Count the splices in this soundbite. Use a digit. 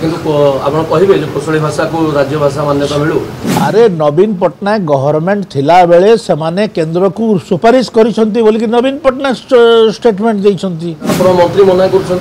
0